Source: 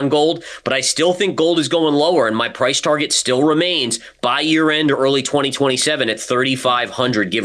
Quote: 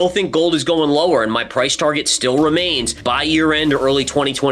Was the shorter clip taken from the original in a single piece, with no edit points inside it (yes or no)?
no